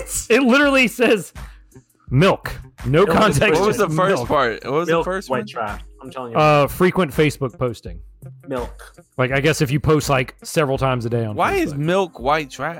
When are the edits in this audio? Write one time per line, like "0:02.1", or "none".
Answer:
none

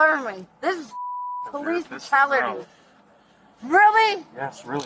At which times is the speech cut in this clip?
none

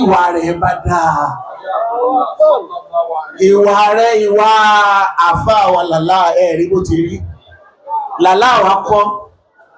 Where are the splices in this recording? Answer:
none

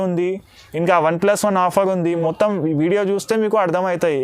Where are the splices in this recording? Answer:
0:02.2

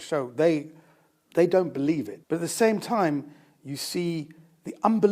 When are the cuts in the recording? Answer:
0:02.1

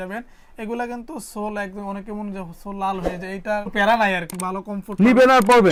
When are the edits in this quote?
none

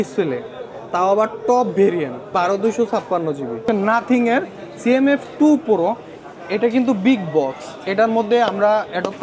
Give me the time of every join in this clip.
0:02.3
0:03.6

